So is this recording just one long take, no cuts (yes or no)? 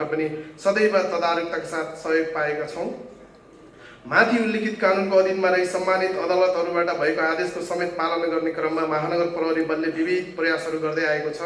yes